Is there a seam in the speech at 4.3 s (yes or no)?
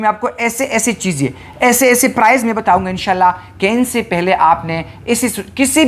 no